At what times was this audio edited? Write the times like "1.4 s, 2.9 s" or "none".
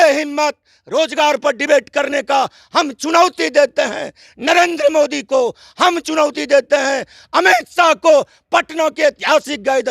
none